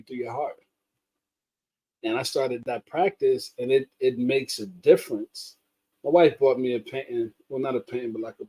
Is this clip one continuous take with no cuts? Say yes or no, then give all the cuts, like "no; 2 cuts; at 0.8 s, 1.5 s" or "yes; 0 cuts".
no; 1 cut; at 5.9 s